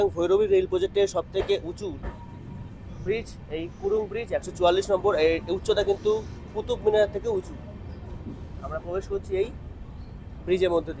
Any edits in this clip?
no; 0 cuts

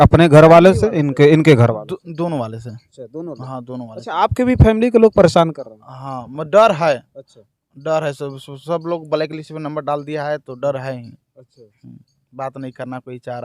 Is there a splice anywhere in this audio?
no; 0 cuts

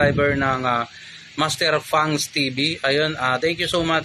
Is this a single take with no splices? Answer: no; 1 cut; at 2.8 s

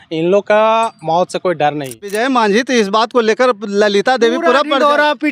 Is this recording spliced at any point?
yes; 1 cut; at 2.1 s

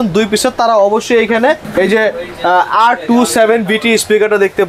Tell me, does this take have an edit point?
no; 0 cuts

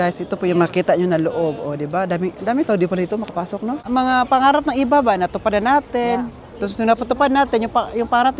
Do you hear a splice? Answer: yes; 1 cut; at 3.9 s

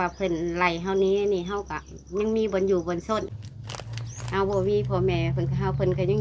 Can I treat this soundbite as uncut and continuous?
no; 1 cut; at 3.3 s

